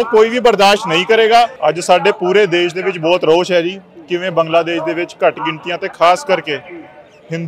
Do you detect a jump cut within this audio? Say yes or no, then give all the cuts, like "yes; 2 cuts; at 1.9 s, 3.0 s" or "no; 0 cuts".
yes; 1 cut; at 1.5 s